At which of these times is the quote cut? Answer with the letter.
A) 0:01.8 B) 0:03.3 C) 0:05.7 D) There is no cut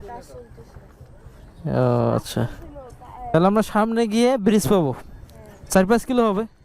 B